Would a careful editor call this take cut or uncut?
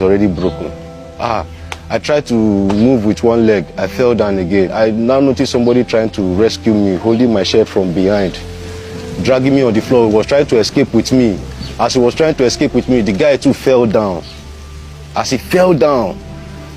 uncut